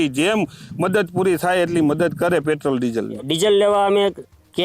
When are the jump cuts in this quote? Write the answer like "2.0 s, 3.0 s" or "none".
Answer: 3.2 s